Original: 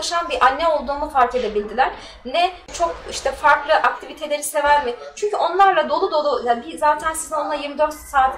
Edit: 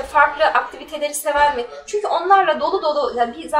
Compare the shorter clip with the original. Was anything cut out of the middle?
no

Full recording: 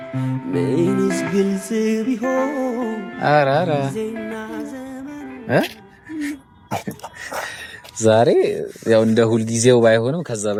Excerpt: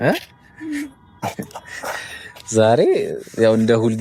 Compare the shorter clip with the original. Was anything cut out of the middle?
no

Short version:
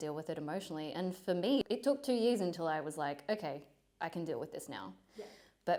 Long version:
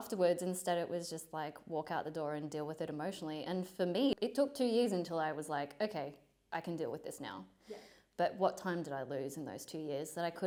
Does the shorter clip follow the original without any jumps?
yes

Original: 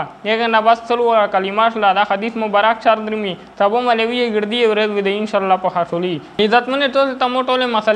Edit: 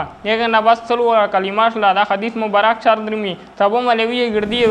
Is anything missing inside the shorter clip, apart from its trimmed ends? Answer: no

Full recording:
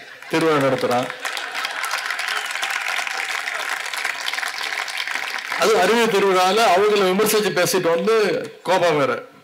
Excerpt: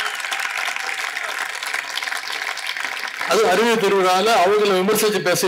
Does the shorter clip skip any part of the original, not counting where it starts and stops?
no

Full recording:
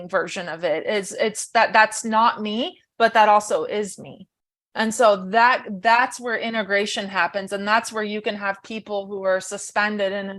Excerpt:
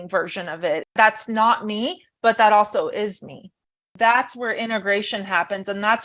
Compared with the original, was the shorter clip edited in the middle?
yes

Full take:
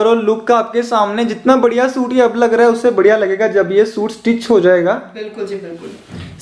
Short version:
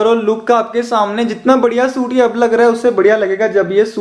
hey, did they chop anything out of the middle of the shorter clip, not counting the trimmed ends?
no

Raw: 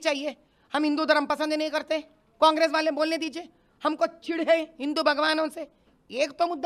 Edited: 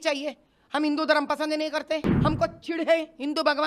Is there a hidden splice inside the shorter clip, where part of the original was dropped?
yes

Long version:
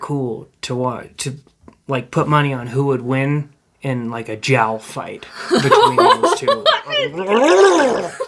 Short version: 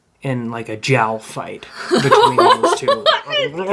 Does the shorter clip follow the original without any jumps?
yes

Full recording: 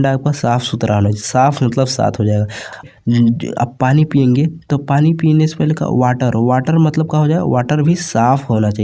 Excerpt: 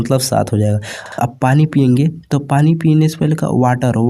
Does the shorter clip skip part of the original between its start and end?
yes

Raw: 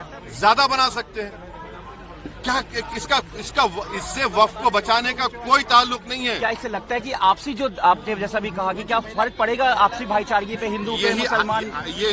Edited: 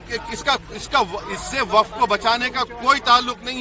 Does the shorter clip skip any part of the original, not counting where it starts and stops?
no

